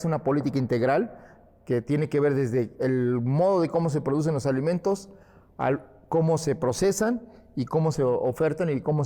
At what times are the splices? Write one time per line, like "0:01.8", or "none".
none